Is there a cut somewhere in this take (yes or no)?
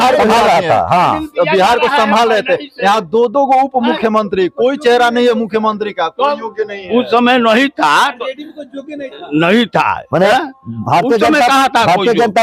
no